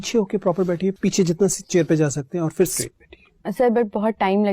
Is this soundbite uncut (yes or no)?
no